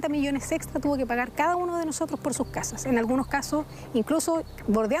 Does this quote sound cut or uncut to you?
uncut